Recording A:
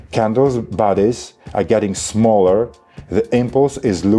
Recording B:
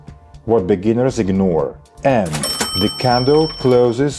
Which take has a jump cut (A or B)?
B